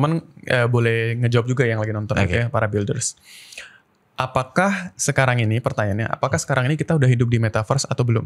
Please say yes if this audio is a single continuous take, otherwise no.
yes